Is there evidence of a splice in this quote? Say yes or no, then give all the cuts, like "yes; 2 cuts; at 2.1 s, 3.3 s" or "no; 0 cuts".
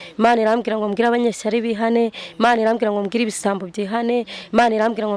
no; 0 cuts